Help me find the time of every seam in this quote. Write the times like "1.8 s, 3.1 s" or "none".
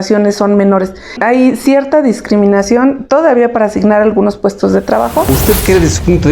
1.2 s, 5.4 s